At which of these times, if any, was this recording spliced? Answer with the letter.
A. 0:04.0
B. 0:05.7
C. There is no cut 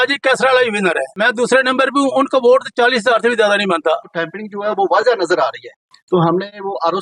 A